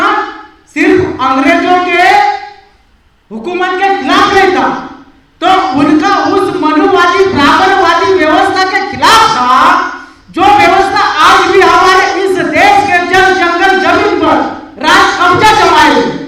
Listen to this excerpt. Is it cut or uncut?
uncut